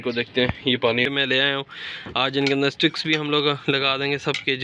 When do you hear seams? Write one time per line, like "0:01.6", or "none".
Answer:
0:01.1